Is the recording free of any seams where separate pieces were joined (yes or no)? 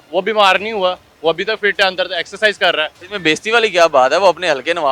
no